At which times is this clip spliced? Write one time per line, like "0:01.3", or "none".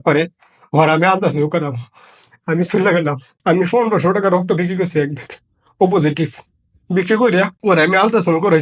0:03.3
0:07.5